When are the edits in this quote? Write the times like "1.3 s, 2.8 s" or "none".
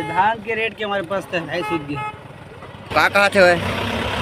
2.8 s